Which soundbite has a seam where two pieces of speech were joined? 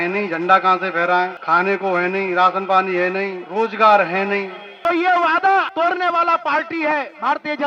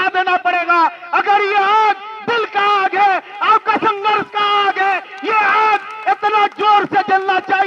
first; 4 cuts; at 1.4 s, 3.4 s, 4.6 s, 5.7 s

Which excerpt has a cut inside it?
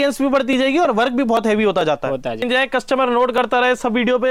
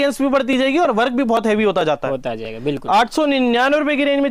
first; 1 cut; at 2.4 s

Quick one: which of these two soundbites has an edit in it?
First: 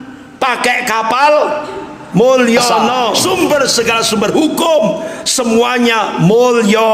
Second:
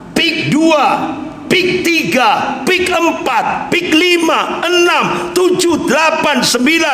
first; 1 cut; at 3.2 s

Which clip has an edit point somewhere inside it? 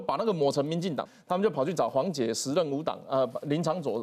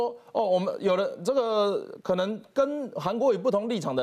first; 1 cut; at 1.0 s

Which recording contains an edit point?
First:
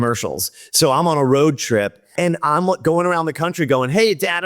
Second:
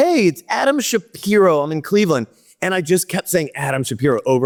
first; 1 cut; at 2.2 s

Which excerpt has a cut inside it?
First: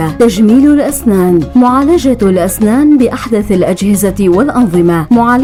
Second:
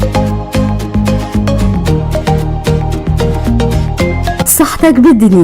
second; 1 cut; at 3.4 s

